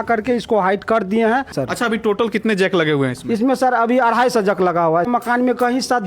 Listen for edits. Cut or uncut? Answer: cut